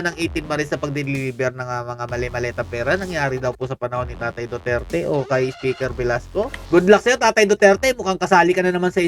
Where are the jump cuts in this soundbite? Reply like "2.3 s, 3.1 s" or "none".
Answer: 6.6 s